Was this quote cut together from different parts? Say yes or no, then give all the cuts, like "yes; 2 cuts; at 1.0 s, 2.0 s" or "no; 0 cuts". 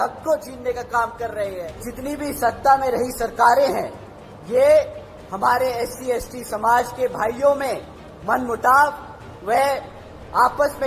yes; 1 cut; at 1.9 s